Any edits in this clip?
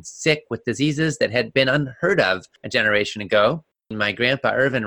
yes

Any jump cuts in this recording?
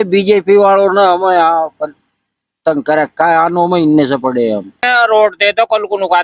yes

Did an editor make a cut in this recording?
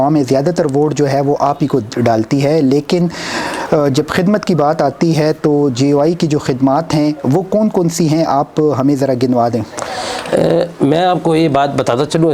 no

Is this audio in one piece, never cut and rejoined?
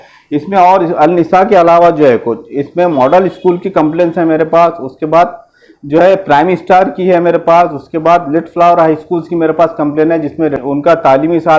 no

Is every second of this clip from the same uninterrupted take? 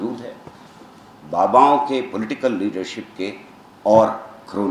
yes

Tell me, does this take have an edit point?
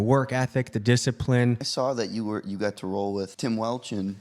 yes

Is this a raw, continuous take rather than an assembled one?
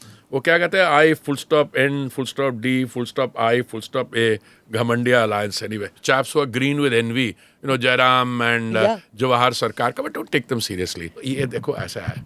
no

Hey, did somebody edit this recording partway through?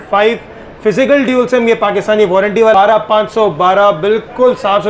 yes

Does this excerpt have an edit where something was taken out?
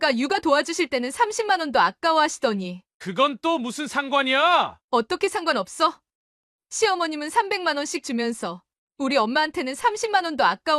no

